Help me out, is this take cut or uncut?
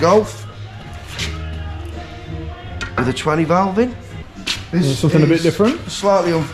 uncut